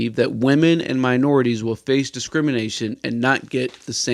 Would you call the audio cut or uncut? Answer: uncut